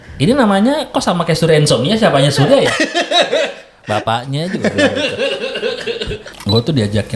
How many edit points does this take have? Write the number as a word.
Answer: one